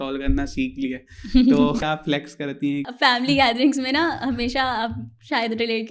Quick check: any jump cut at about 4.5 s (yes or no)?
no